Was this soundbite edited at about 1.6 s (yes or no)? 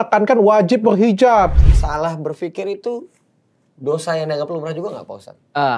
yes